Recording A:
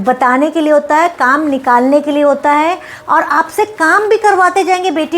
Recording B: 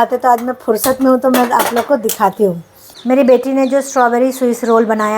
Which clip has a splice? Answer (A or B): B